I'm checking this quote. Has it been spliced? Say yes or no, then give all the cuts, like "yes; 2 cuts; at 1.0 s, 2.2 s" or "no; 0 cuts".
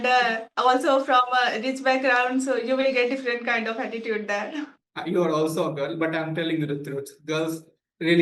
no; 0 cuts